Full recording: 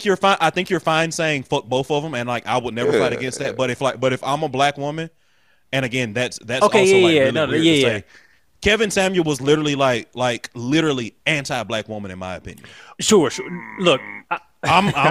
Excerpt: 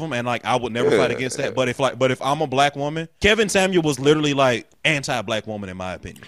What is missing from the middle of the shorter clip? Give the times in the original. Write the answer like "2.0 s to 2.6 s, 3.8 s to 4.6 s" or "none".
5.1 s to 8.5 s, 10.1 s to 11.1 s